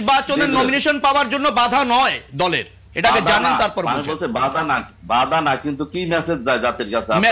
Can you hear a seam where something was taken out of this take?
no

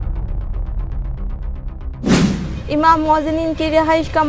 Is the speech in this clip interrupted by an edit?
yes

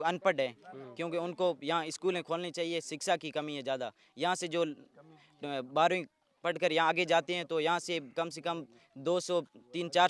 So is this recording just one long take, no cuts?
yes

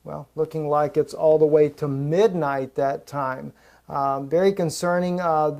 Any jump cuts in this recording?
yes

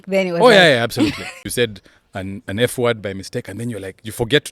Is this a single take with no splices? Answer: no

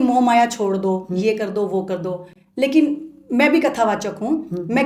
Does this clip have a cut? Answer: no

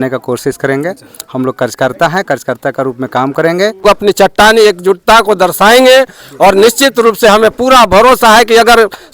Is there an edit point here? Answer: yes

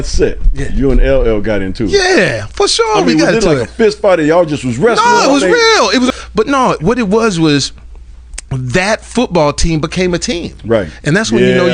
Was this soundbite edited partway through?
yes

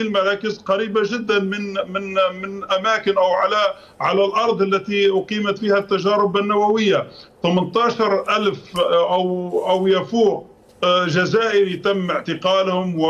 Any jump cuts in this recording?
no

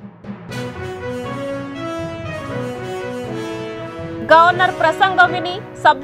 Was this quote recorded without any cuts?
yes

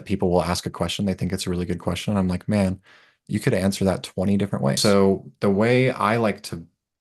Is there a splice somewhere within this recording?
yes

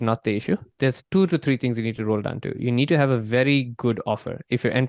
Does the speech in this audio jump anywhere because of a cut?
yes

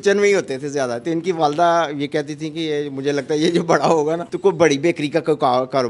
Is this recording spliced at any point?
no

